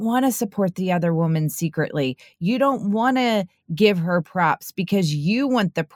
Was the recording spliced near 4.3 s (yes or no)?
no